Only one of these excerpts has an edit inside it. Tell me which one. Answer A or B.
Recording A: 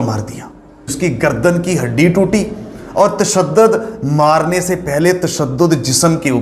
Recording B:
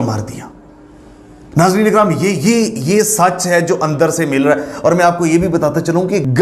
A